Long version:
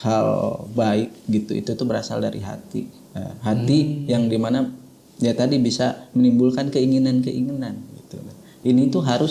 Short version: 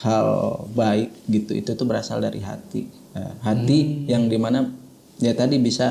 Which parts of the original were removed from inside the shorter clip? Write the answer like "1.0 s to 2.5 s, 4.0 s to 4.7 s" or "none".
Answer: none